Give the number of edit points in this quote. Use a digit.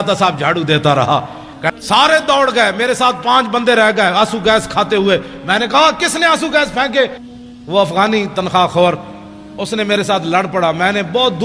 2